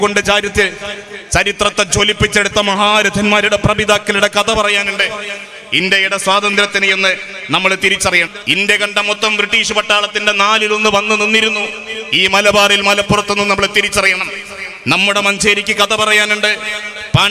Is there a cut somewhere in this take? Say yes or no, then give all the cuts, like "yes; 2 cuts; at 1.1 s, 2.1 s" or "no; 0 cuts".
yes; 1 cut; at 8.3 s